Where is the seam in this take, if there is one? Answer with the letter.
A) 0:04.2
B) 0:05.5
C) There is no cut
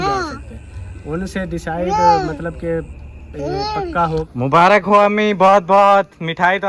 A